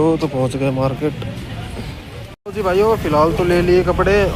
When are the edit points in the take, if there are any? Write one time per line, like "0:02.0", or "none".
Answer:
none